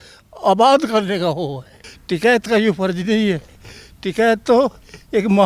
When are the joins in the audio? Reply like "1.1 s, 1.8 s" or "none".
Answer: 1.6 s